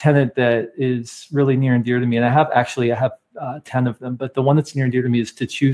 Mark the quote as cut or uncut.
uncut